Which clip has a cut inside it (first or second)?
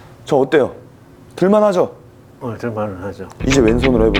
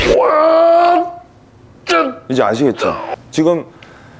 second